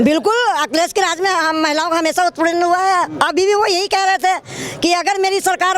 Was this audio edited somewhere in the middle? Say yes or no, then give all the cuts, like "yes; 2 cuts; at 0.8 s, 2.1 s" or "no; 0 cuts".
no; 0 cuts